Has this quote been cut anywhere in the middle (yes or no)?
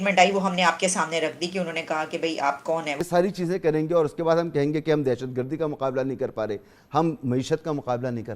yes